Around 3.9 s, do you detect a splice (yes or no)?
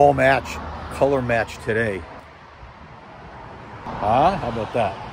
yes